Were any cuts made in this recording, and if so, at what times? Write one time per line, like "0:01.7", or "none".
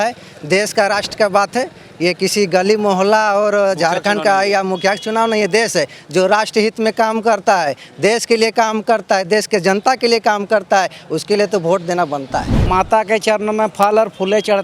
0:12.5